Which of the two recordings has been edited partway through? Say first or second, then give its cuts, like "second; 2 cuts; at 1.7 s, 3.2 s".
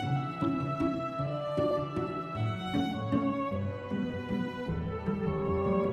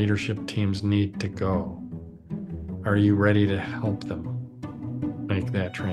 second; 1 cut; at 3.6 s